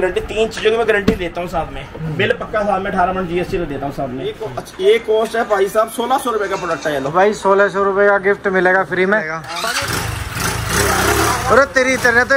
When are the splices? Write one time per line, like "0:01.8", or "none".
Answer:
0:04.5
0:09.4